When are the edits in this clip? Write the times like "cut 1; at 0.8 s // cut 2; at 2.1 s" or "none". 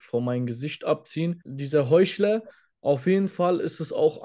cut 1; at 1.4 s